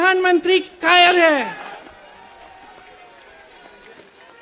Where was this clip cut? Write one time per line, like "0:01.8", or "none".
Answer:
0:01.7